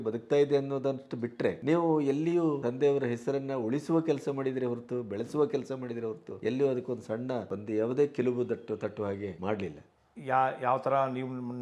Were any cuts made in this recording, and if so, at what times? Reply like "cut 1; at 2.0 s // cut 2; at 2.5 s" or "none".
cut 1; at 1.6 s // cut 2; at 2.6 s // cut 3; at 6.3 s // cut 4; at 7.5 s // cut 5; at 9.5 s